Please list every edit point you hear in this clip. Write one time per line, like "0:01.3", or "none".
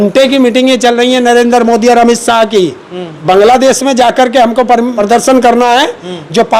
0:03.1
0:04.9